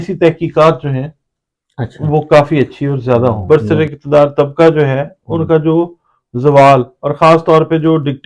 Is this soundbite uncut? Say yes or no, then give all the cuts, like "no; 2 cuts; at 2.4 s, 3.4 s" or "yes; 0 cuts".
no; 1 cut; at 3.4 s